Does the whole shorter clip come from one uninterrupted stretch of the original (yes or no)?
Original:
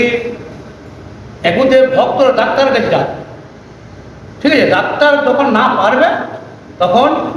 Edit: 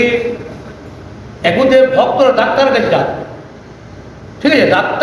yes